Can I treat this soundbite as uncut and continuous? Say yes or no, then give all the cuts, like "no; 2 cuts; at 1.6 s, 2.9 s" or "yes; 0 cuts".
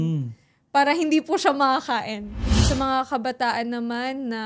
no; 1 cut; at 2.6 s